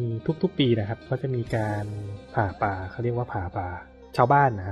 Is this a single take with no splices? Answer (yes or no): yes